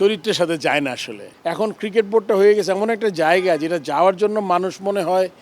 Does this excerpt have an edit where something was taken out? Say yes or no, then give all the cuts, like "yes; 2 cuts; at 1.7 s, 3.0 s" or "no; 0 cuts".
yes; 1 cut; at 1.2 s